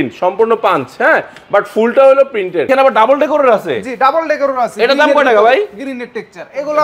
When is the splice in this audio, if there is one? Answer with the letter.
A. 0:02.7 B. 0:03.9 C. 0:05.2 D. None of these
A